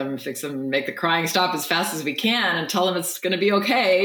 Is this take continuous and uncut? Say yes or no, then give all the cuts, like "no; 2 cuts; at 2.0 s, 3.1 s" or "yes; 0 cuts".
yes; 0 cuts